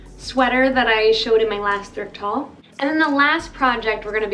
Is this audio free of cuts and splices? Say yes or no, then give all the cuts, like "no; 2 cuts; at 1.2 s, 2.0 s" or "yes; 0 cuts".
no; 1 cut; at 2.6 s